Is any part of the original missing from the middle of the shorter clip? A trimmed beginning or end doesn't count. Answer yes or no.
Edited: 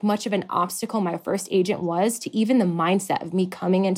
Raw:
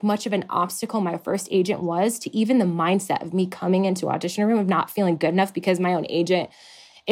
no